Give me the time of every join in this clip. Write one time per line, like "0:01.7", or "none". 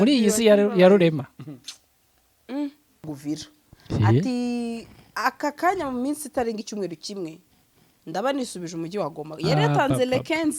0:03.1